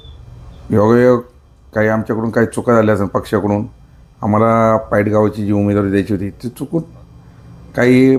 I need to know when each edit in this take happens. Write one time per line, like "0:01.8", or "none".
none